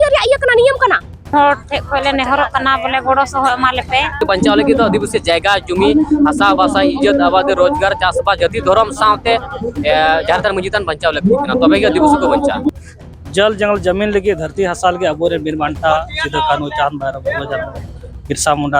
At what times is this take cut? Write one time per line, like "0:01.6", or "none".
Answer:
0:01.3
0:04.2
0:12.8